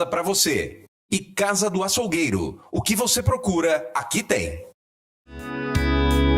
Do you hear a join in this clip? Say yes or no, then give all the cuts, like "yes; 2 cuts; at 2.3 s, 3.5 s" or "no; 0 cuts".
yes; 1 cut; at 5.5 s